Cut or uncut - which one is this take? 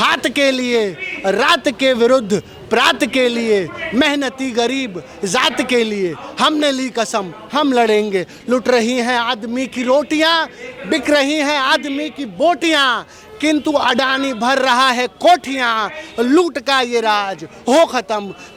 uncut